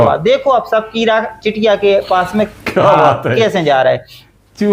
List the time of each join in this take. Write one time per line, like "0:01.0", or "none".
none